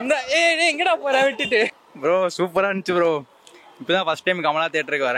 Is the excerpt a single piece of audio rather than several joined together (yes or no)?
no